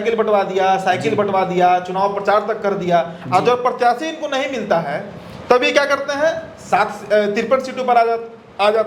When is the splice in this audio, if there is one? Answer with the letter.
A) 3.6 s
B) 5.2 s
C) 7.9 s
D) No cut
D